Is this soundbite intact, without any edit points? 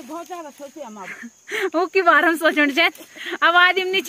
yes; 0 cuts

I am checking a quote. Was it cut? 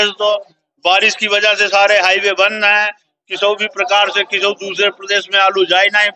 no; 0 cuts

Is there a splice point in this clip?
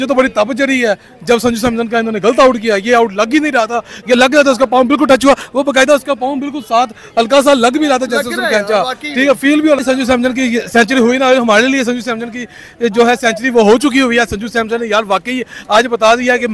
no; 0 cuts

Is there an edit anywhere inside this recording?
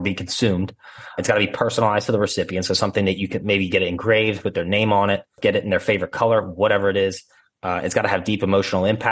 yes; 2 cuts; at 1.2 s, 5.4 s

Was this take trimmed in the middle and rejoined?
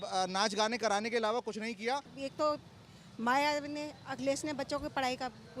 yes; 1 cut; at 2.1 s

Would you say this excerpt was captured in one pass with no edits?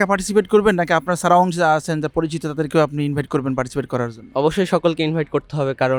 yes; 0 cuts

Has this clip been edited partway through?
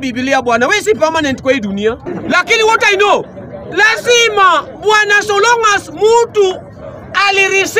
yes; 1 cut; at 2.1 s

